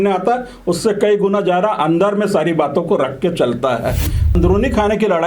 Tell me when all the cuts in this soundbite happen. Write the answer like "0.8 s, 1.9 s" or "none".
4.3 s